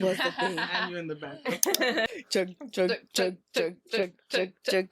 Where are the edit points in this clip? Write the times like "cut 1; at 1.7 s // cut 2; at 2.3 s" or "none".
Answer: cut 1; at 2.1 s